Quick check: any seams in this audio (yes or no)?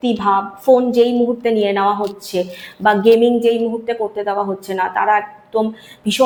no